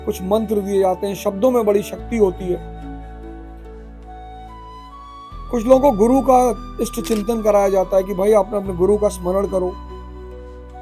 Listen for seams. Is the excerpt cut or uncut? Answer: cut